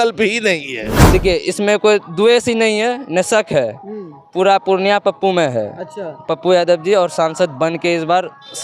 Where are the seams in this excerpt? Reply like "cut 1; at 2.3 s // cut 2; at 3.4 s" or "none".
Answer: cut 1; at 0.9 s